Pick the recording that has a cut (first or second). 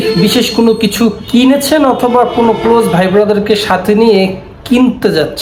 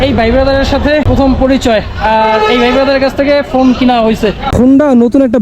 second